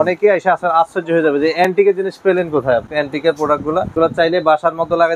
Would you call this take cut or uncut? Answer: cut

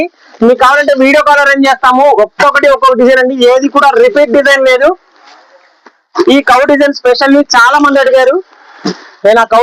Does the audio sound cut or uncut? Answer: uncut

